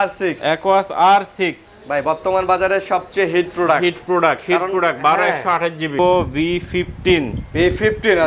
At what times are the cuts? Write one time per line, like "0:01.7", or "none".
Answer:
0:06.0